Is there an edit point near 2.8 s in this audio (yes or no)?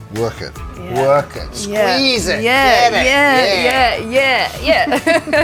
no